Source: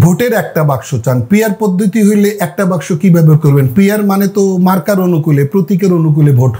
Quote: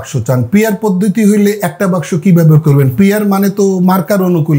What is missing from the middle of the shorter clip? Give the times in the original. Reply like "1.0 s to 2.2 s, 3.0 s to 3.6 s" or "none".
none